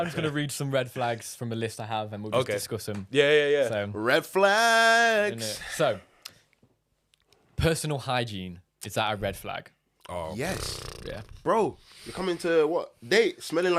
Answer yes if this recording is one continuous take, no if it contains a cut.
yes